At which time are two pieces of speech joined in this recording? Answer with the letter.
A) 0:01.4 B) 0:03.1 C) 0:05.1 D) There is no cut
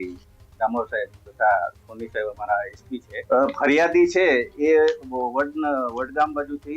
B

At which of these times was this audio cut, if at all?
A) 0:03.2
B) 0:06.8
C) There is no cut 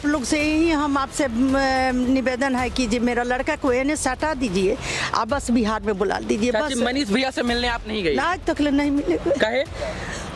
C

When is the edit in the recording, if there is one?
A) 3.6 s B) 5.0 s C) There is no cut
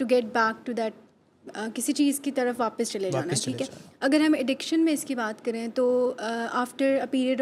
C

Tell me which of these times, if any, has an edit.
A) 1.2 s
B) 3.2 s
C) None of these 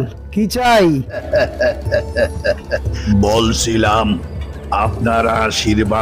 A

